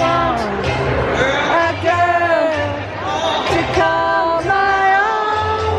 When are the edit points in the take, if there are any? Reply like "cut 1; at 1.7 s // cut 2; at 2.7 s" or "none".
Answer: none